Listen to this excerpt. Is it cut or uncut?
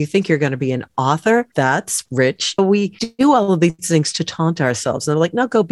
cut